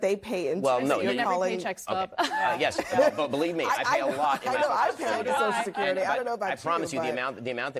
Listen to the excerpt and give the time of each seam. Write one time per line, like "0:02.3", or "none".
0:02.3